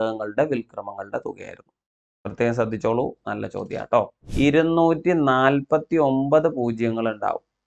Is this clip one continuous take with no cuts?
no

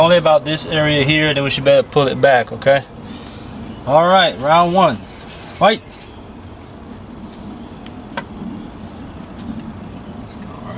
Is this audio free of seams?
yes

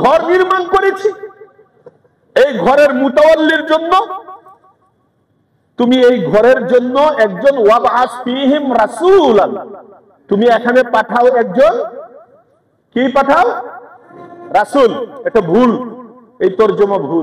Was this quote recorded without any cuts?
yes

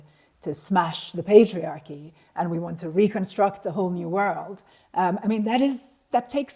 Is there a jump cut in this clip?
no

